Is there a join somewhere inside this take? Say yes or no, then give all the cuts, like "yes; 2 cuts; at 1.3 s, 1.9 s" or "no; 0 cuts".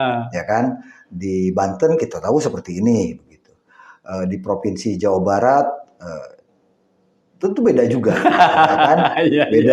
no; 0 cuts